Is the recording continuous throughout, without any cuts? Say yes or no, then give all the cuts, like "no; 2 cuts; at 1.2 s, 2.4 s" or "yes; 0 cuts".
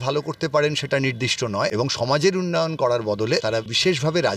no; 2 cuts; at 1.7 s, 3.5 s